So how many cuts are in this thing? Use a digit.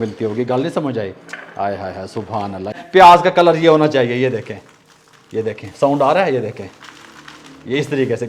1